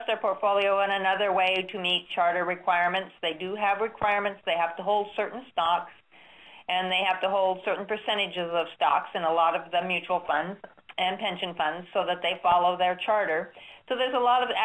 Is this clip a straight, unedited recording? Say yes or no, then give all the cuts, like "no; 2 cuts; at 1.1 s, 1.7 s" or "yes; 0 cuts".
yes; 0 cuts